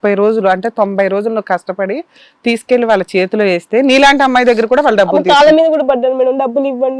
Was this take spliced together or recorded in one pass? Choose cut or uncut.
uncut